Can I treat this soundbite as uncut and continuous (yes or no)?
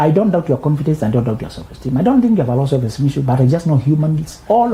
yes